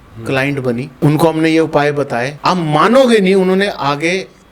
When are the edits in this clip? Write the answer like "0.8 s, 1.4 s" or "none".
0.9 s, 2.3 s